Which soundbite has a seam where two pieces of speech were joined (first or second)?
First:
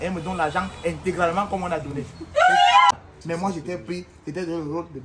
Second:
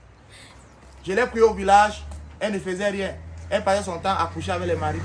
first